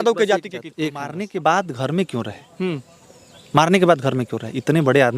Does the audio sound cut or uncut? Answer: cut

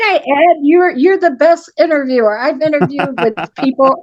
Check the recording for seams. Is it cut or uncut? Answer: uncut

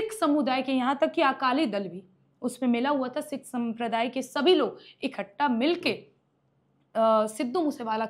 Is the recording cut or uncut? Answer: uncut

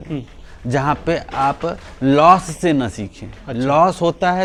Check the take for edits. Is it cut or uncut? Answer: uncut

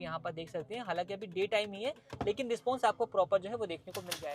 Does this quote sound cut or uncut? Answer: uncut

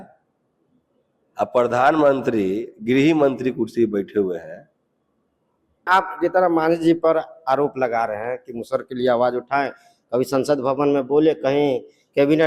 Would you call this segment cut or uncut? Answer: cut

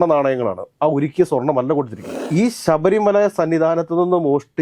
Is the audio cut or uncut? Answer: cut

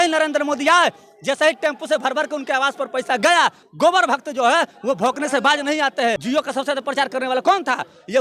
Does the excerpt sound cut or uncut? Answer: cut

